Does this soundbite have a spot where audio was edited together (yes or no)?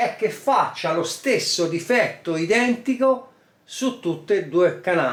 no